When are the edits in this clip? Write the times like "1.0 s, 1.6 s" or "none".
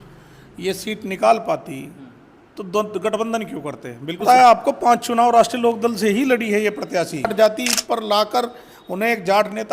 4.2 s, 7.3 s